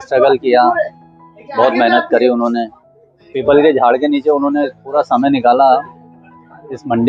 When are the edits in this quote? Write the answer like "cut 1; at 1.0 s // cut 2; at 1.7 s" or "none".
none